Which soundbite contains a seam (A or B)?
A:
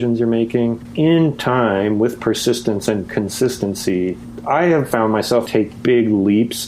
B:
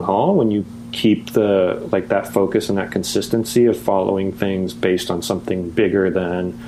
A